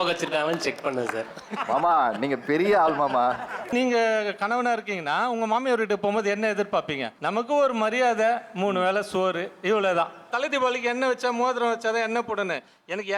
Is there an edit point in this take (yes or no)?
yes